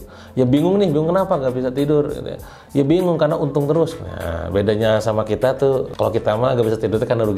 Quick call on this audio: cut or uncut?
uncut